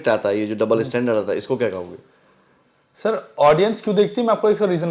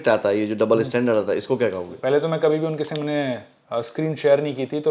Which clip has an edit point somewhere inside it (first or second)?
second